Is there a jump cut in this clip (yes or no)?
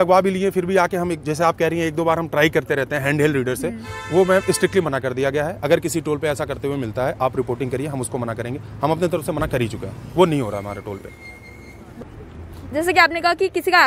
no